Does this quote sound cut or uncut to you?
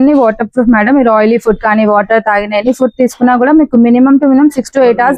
uncut